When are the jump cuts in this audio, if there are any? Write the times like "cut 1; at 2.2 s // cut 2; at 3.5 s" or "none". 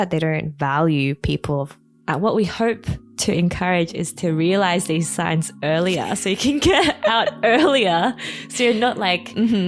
cut 1; at 1.7 s